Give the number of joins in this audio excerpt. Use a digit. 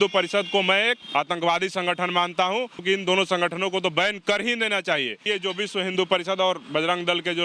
3